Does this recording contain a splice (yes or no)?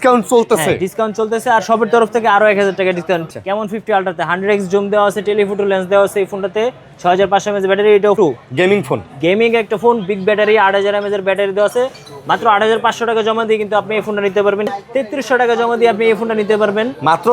yes